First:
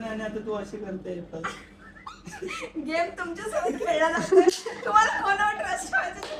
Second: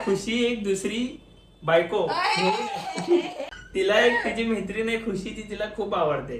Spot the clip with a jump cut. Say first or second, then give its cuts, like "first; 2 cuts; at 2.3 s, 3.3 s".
second; 1 cut; at 3.6 s